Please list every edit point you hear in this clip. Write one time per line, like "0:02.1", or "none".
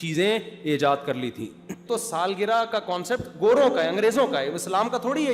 0:01.8